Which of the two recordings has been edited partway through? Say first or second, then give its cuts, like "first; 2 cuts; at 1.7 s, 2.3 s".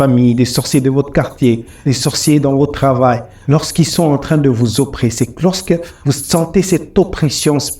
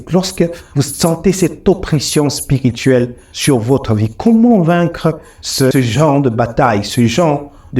second; 1 cut; at 5.7 s